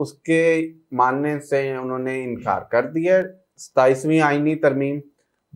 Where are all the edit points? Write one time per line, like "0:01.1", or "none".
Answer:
none

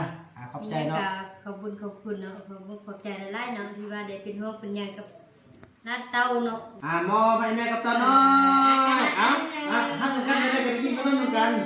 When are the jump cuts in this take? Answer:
0:06.7

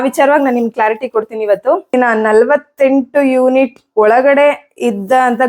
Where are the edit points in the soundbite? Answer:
0:01.9

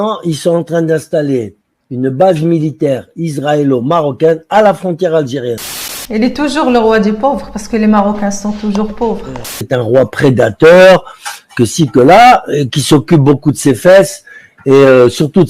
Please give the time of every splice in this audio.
0:05.6
0:09.7

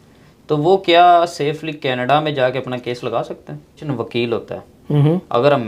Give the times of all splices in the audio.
0:03.9

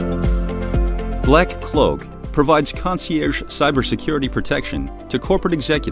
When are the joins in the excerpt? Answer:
0:01.3

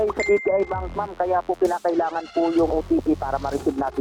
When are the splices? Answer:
0:02.7

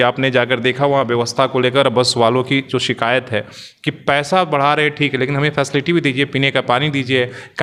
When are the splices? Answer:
none

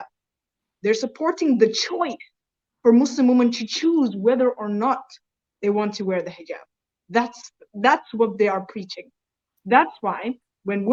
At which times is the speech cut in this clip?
none

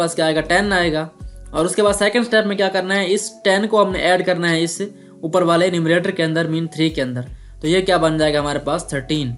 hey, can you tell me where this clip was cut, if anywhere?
none

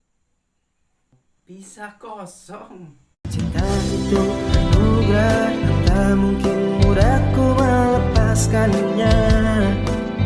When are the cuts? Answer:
0:03.3

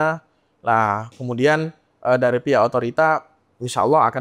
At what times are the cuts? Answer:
none

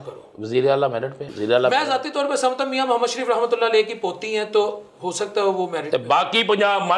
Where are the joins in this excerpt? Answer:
0:01.2

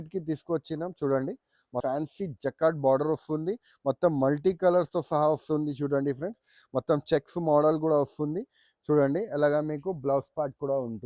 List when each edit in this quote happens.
0:01.8

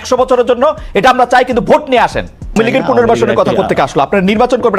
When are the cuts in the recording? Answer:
0:02.6

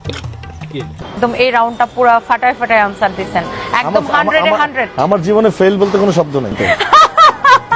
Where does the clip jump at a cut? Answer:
0:01.0
0:06.6

